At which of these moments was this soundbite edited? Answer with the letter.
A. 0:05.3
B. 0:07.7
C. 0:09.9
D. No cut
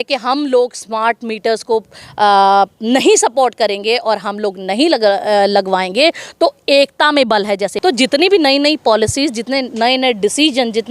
B